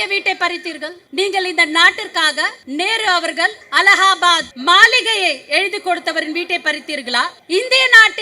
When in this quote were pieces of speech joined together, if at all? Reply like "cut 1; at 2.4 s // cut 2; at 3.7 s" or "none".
cut 1; at 0.9 s // cut 2; at 2.6 s // cut 3; at 3.6 s // cut 4; at 4.5 s // cut 5; at 7.4 s